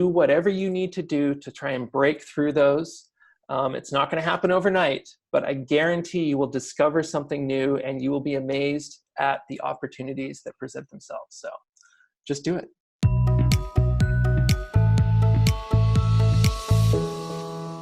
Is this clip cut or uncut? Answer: cut